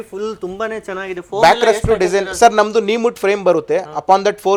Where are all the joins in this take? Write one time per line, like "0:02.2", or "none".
none